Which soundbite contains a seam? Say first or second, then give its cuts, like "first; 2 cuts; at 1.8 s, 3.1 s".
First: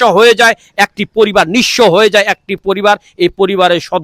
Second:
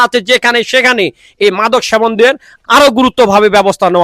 second; 1 cut; at 2.5 s